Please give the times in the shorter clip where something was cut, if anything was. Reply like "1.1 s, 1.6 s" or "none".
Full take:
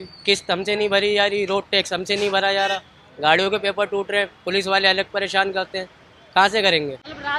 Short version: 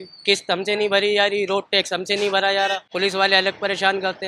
2.8 s

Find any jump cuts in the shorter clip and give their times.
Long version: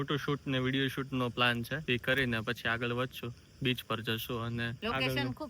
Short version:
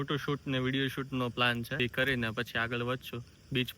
1.7 s

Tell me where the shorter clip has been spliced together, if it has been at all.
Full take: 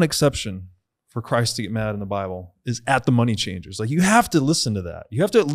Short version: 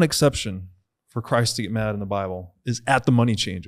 none

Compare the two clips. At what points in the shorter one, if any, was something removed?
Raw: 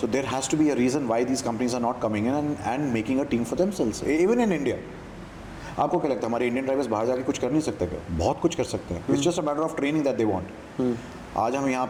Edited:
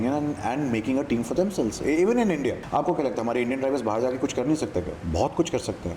2.6 s

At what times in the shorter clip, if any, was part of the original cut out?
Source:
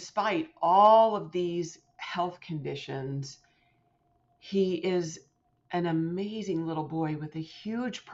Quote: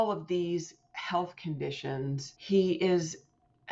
2.3 s

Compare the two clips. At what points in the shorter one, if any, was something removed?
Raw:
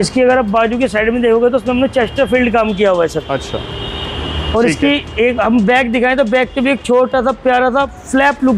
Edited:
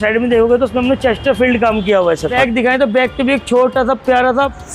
2.4 s

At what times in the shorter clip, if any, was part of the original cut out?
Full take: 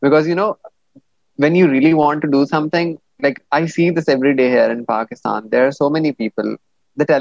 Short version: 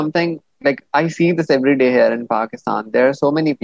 none

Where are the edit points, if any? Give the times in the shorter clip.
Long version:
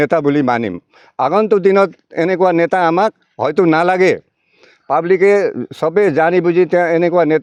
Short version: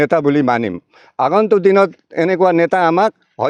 none

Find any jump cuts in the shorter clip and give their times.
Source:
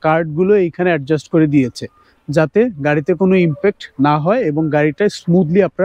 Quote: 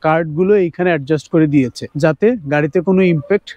1.8 s

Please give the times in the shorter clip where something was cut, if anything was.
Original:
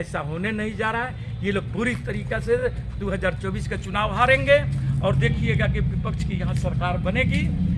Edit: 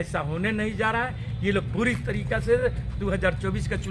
none

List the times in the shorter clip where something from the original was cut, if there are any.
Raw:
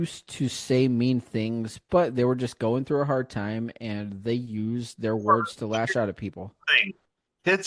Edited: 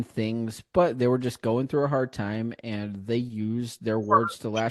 none

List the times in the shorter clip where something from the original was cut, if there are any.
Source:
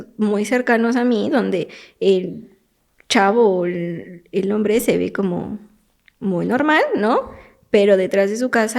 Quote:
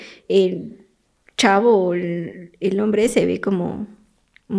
none

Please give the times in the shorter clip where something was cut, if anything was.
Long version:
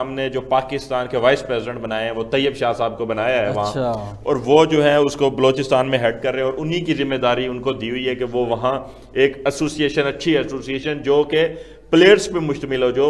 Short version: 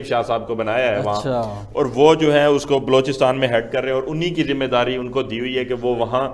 none

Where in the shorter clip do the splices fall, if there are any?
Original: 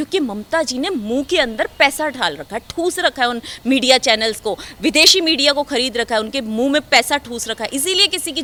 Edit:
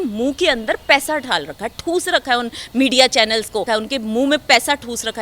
3.7 s

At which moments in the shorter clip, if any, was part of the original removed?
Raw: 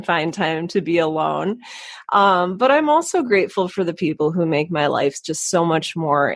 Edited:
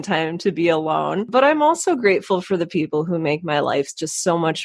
1.3 s

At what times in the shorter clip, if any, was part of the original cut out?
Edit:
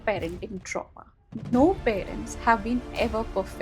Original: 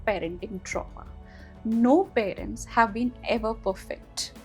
1.5 s

